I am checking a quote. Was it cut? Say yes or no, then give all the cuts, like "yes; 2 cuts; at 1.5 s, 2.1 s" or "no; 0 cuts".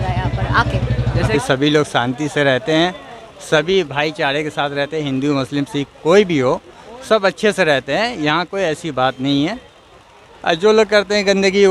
yes; 1 cut; at 1.3 s